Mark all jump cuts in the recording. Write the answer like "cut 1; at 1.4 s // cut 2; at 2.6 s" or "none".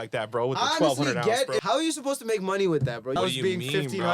cut 1; at 1.6 s // cut 2; at 3.1 s